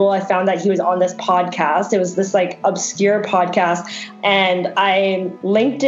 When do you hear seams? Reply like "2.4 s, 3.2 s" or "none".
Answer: 4.0 s